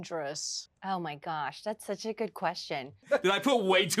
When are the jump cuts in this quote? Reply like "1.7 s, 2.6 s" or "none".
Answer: 3.0 s